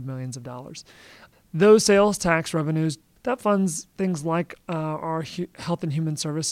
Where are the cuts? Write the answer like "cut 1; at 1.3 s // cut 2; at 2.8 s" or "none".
cut 1; at 1.1 s // cut 2; at 3.1 s